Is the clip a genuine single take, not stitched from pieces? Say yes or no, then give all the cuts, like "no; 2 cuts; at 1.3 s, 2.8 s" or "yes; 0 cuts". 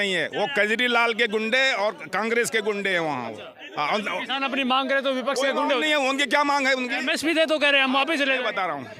yes; 0 cuts